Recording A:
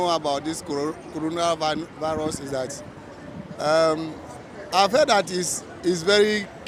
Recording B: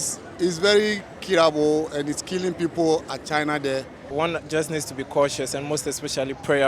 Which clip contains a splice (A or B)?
B